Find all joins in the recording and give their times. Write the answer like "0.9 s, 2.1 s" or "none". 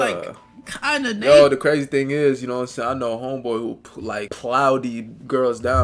4.3 s